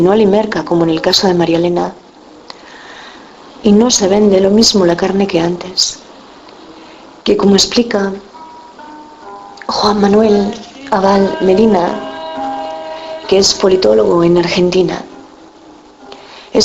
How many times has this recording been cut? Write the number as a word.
one